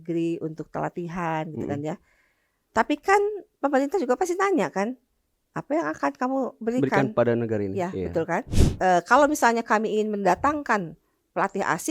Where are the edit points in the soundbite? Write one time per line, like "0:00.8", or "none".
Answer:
0:08.6